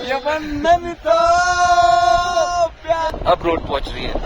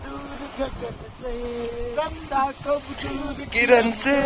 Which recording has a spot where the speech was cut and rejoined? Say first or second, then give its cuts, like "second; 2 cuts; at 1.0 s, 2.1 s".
first; 1 cut; at 3.1 s